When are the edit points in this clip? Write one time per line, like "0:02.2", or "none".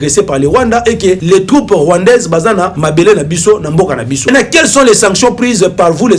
0:01.2
0:02.8
0:04.3